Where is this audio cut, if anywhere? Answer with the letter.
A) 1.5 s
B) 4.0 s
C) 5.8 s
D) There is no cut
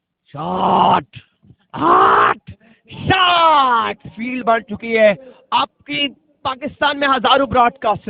B